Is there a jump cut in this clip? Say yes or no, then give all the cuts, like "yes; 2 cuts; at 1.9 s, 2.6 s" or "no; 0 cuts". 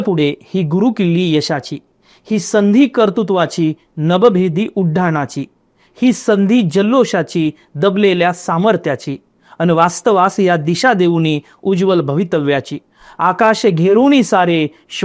no; 0 cuts